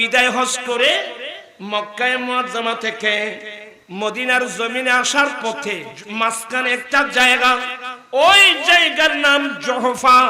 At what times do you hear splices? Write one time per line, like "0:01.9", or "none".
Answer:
0:06.0